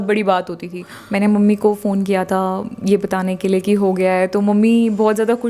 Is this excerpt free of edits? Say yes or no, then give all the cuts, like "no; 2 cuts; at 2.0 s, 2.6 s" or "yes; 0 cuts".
no; 1 cut; at 1.0 s